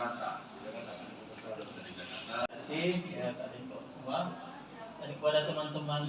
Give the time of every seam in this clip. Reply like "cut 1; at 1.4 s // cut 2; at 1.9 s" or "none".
cut 1; at 2.6 s